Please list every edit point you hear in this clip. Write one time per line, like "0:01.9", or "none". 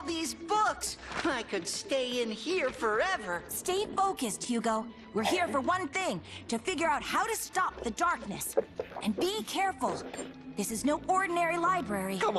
0:05.4